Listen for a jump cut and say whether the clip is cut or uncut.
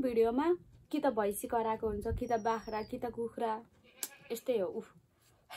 uncut